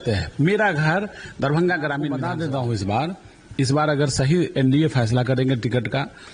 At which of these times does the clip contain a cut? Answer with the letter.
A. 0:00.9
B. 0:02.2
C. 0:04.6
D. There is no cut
B